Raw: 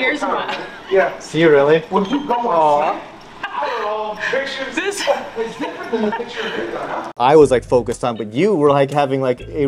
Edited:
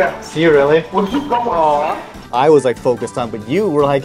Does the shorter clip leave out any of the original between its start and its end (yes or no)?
yes